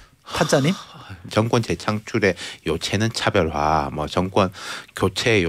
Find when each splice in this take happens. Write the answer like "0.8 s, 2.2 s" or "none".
1.2 s